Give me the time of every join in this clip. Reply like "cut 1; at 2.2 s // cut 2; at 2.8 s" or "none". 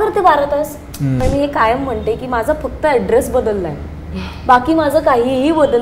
cut 1; at 1.2 s